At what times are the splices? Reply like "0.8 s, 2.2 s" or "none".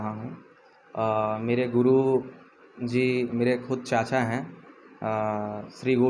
none